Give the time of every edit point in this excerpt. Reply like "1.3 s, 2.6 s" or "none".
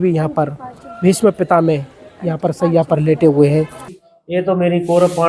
3.9 s